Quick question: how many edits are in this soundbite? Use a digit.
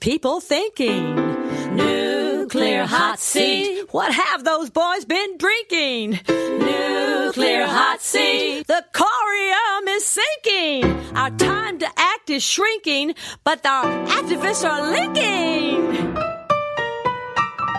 0